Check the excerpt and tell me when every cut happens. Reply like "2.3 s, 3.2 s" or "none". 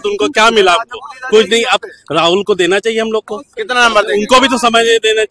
none